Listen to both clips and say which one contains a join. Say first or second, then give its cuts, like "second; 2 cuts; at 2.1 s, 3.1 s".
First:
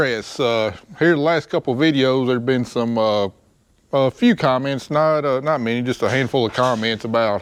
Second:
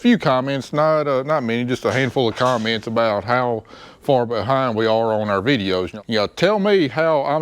second; 1 cut; at 5.9 s